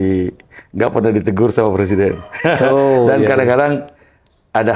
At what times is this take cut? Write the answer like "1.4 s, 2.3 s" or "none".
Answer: none